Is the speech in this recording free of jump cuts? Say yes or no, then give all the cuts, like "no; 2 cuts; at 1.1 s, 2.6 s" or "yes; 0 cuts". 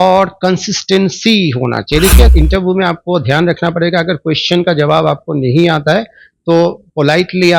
no; 1 cut; at 2.3 s